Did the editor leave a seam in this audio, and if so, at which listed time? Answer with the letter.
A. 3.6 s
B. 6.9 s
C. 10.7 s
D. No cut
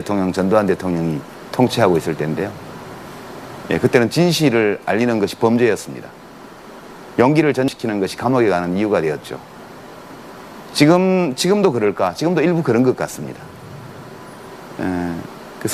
C